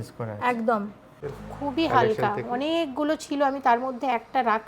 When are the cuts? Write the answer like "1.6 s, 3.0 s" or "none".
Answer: 1.2 s